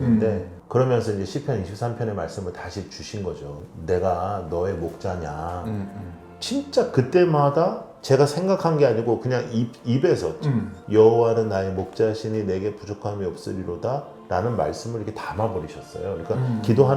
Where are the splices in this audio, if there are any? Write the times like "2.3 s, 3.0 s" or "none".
3.6 s, 6.3 s, 10.8 s